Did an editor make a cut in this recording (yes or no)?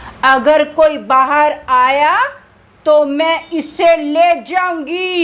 no